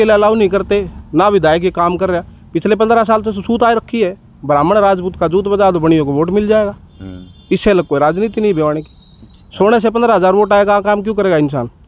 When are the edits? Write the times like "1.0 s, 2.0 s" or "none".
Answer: none

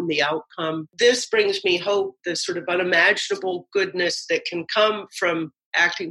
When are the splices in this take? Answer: 0.8 s, 2.1 s

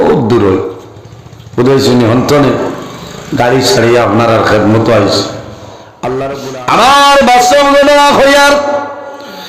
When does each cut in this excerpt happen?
6.4 s

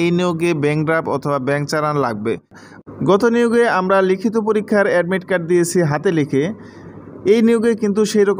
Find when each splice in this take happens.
2.6 s

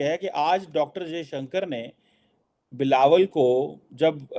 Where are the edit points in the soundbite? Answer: none

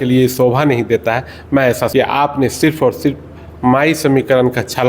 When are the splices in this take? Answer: 1.9 s

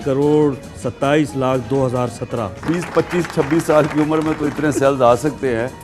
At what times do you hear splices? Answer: 2.6 s

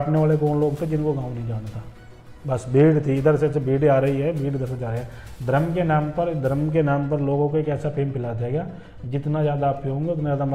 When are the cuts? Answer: none

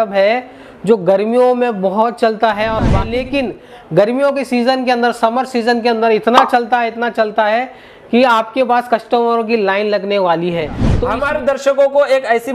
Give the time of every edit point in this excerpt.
3.0 s, 10.9 s

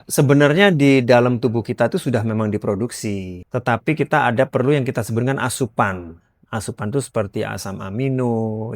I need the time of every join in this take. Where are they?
3.3 s

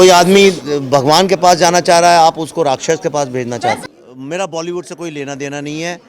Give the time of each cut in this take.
3.8 s

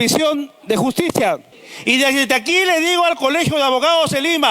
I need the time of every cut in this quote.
1.5 s

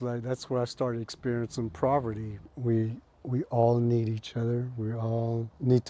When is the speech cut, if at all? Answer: 2.5 s

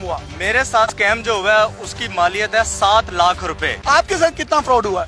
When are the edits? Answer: 0.9 s, 3.7 s

